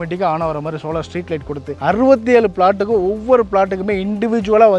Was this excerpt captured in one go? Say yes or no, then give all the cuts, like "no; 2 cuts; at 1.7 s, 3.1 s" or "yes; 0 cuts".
yes; 0 cuts